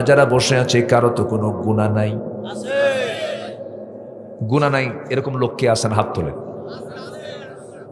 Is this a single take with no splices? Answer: yes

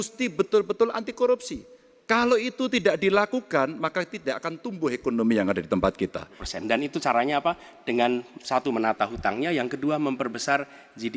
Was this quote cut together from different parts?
yes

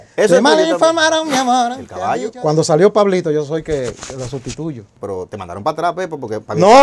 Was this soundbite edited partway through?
yes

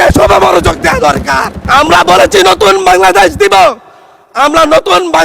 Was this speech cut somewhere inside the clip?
yes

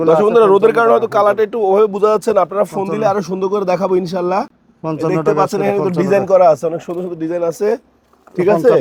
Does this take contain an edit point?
no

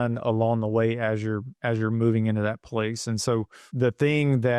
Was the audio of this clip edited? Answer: yes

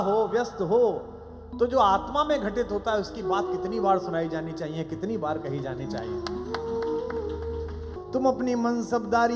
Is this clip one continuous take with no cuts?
no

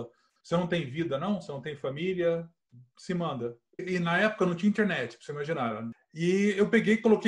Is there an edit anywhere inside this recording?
yes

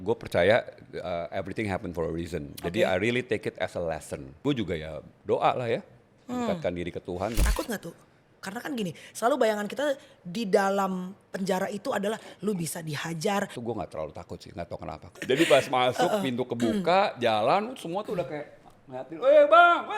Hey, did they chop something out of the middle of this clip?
yes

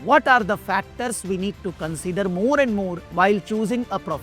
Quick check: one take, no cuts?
no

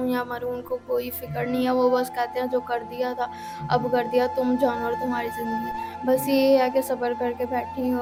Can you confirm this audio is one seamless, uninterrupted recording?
yes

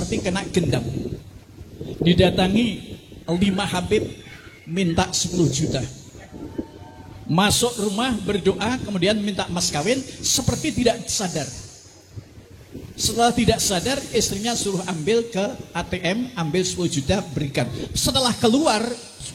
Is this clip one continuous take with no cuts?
yes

